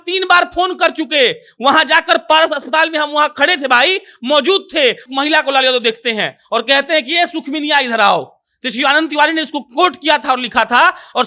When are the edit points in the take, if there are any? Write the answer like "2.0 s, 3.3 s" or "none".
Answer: 5.0 s